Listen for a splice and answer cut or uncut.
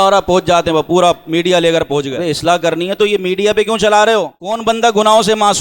cut